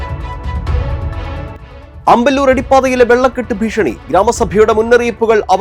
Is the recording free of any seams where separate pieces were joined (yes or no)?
yes